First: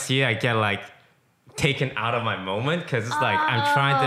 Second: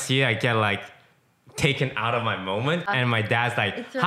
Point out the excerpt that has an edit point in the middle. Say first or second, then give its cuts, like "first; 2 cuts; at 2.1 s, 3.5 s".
second; 1 cut; at 2.9 s